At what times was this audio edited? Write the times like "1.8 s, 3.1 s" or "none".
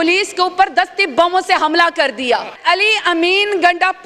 2.6 s